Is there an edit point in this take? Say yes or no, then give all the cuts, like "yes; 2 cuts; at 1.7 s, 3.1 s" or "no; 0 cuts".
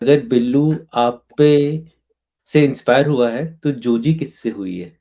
no; 0 cuts